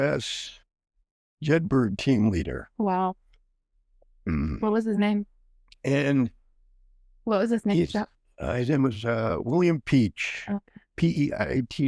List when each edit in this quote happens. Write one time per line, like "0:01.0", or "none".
none